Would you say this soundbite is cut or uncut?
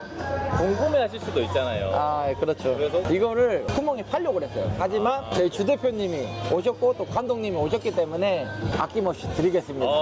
cut